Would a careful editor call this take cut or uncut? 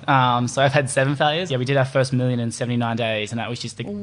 cut